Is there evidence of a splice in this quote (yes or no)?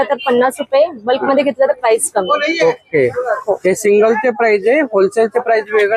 no